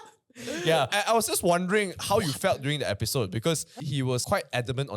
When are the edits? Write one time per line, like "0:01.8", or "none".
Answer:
0:00.9
0:04.1